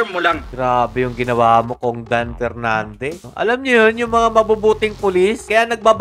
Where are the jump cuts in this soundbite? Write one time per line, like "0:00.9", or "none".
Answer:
0:03.2